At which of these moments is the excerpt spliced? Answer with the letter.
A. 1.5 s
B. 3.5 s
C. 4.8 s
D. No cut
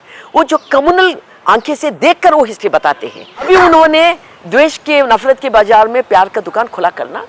B